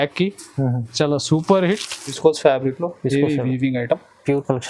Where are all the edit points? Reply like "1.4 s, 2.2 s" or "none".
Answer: 2.1 s